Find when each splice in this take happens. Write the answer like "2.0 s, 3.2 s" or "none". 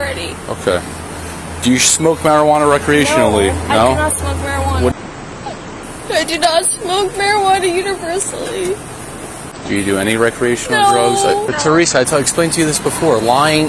4.9 s, 11.5 s